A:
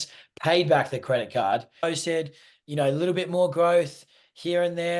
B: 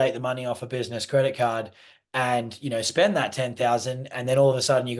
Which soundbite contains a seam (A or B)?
A